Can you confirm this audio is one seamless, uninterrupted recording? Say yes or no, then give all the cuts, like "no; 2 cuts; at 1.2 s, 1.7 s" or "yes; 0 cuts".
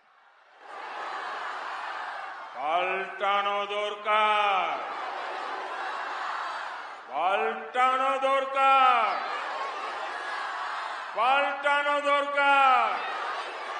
yes; 0 cuts